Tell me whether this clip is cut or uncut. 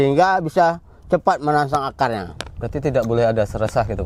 uncut